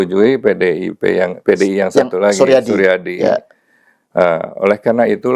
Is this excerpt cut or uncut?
cut